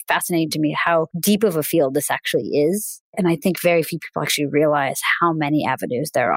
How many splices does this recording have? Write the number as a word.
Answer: two